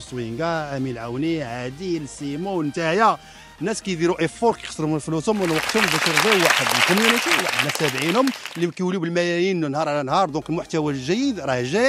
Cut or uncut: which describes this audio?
uncut